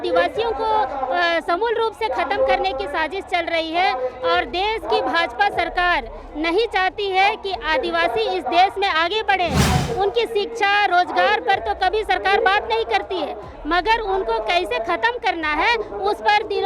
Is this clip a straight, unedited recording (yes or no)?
yes